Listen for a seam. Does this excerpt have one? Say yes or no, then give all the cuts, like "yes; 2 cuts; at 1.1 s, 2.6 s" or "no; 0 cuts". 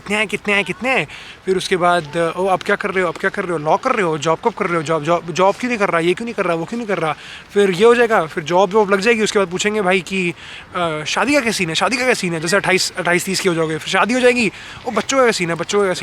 no; 0 cuts